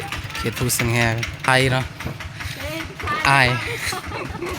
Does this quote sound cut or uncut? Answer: cut